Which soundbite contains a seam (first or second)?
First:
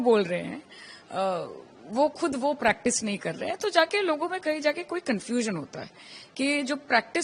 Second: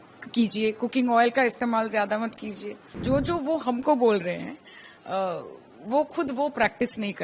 second